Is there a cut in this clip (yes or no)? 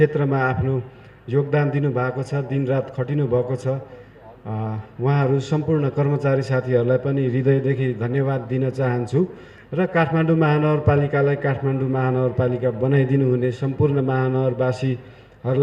no